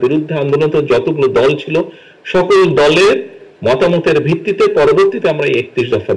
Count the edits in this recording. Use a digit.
0